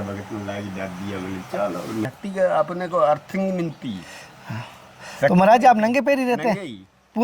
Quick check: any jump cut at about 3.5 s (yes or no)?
no